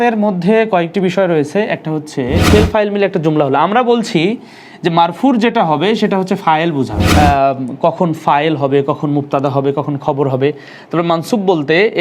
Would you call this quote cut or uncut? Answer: cut